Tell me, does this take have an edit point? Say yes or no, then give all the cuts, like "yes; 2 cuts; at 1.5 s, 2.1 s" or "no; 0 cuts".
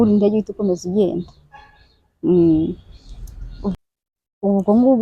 yes; 1 cut; at 3.8 s